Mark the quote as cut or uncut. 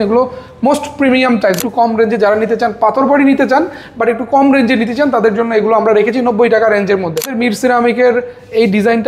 cut